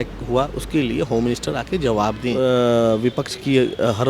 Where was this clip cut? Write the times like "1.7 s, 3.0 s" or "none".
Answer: 2.3 s